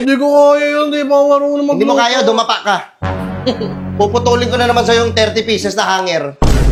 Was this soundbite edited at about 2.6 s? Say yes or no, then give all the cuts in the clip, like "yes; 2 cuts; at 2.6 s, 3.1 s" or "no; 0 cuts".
no; 0 cuts